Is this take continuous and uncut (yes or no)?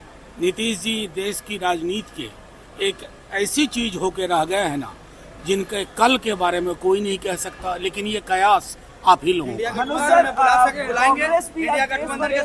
yes